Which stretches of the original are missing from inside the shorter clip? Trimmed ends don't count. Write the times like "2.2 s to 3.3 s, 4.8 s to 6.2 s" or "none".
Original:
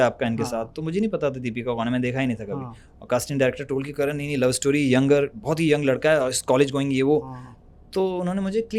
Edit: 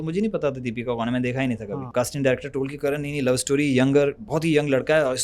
2.6 s to 2.9 s